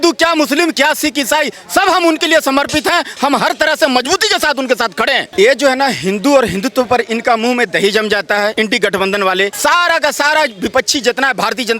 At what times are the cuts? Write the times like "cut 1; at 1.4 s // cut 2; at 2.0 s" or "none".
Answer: cut 1; at 5.2 s // cut 2; at 8.5 s // cut 3; at 9.5 s